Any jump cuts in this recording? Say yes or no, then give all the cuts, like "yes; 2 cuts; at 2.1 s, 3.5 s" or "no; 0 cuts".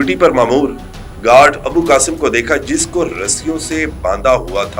no; 0 cuts